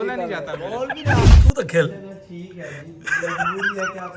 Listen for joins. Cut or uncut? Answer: cut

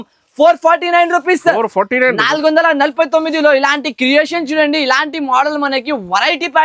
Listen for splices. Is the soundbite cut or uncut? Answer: uncut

